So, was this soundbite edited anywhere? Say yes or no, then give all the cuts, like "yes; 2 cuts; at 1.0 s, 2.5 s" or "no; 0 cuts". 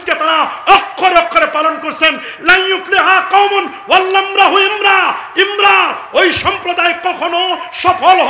no; 0 cuts